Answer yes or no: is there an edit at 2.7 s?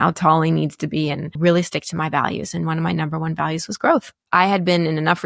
no